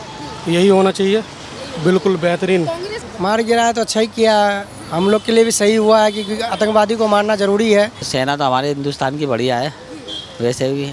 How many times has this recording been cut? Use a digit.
2